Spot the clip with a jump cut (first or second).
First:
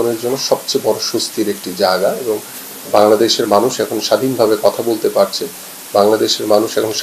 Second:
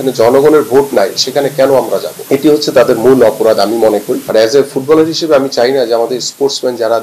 second